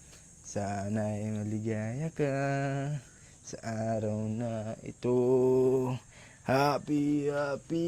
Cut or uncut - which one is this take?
uncut